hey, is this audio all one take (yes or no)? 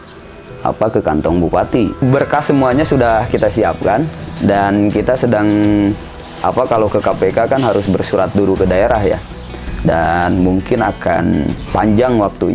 no